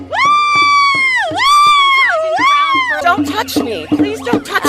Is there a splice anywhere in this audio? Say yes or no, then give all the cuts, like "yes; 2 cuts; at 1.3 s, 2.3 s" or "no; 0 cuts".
yes; 1 cut; at 3.0 s